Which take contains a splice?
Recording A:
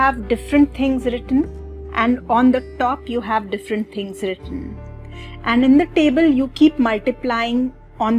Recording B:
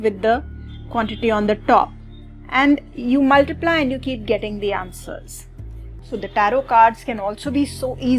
B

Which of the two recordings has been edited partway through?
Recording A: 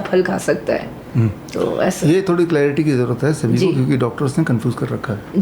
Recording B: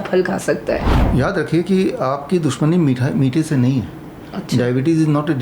B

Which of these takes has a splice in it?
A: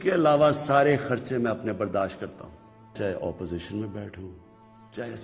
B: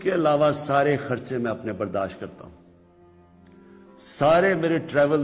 A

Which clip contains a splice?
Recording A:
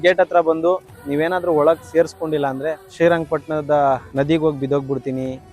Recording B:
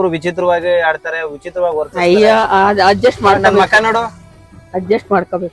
A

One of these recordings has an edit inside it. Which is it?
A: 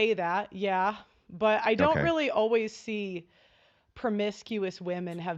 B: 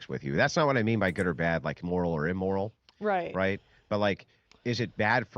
B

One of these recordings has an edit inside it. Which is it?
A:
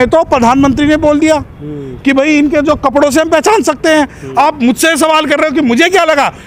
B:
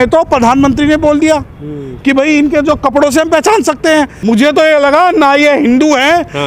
B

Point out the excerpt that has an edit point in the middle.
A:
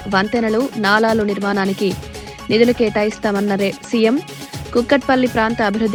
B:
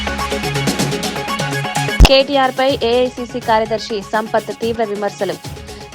B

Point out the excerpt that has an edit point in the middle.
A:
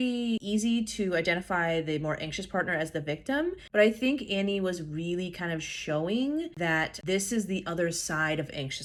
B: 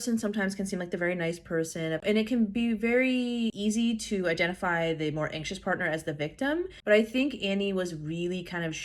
B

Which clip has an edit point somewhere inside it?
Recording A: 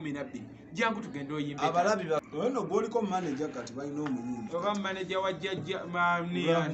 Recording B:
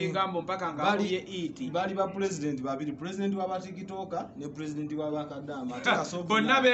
A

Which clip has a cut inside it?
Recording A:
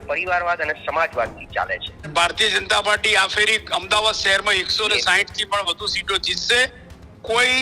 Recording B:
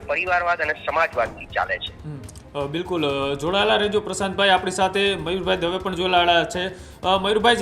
A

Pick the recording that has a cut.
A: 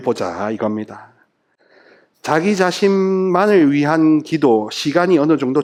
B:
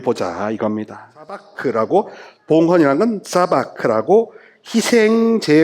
B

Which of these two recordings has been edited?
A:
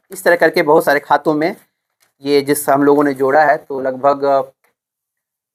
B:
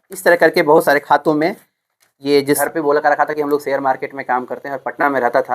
B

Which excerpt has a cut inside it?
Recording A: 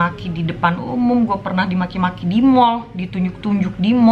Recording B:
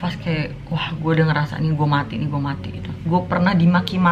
B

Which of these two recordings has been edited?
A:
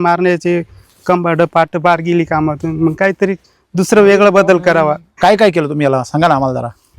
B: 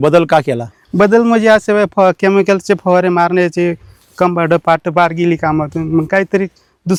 A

